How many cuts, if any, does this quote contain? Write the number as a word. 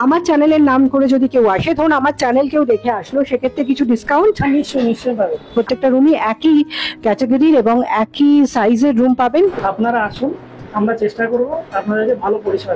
two